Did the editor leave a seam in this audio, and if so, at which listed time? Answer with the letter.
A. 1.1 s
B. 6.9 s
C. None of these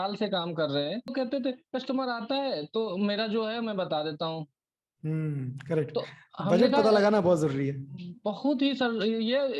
A